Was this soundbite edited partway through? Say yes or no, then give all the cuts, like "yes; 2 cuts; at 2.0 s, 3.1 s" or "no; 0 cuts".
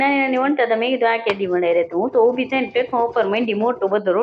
no; 0 cuts